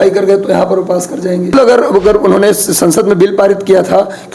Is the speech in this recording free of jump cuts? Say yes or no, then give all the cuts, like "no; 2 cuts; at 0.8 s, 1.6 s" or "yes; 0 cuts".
no; 1 cut; at 1.5 s